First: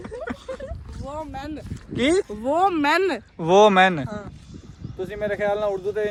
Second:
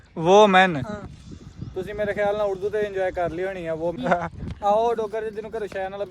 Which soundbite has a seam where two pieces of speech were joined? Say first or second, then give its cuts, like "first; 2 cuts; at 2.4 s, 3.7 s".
second; 1 cut; at 4.0 s